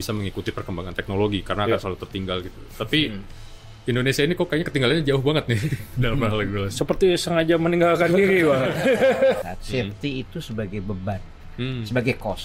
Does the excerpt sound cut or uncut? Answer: cut